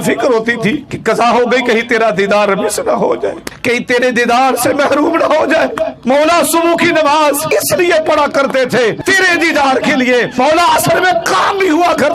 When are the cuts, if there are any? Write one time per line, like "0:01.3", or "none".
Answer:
0:00.9
0:03.5
0:05.9
0:07.4
0:09.0
0:10.3